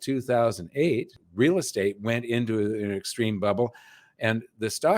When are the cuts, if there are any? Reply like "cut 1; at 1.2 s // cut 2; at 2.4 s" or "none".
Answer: cut 1; at 1.2 s

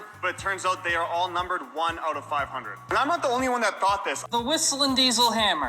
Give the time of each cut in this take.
cut 1; at 4.2 s

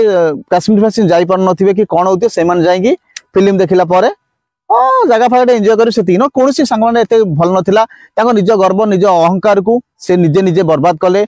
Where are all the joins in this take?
none

